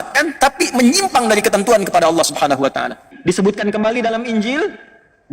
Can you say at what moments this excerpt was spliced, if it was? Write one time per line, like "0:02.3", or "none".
0:03.1